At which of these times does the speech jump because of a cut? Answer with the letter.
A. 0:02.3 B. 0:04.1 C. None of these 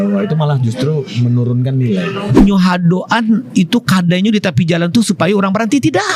A